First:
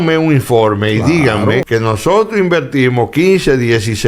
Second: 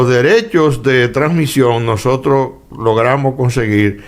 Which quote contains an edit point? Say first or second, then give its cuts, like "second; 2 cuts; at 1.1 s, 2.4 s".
first; 1 cut; at 1.7 s